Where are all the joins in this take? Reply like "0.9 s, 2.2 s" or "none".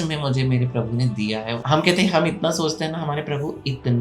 1.6 s